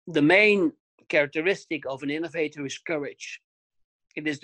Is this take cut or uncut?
cut